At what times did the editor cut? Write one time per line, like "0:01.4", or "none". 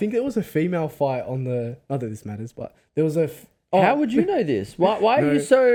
none